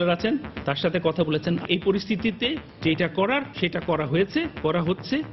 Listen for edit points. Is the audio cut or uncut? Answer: cut